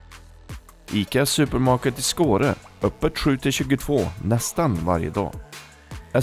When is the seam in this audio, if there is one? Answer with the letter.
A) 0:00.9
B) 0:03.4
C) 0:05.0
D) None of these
A